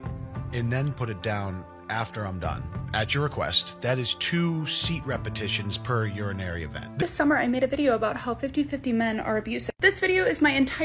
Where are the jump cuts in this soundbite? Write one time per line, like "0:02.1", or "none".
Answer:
0:07.0
0:09.8